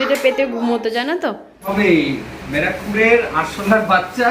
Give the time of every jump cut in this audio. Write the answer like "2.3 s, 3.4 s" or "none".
1.7 s